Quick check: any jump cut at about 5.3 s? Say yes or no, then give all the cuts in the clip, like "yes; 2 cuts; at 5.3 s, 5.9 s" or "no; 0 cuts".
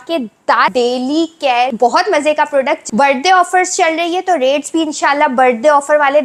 no; 3 cuts; at 0.7 s, 1.7 s, 2.8 s